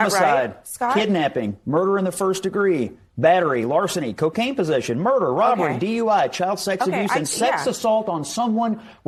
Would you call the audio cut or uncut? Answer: uncut